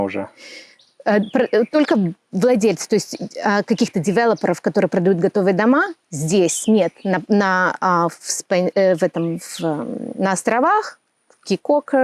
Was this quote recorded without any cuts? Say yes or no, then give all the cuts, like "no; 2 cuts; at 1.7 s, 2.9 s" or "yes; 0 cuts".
yes; 0 cuts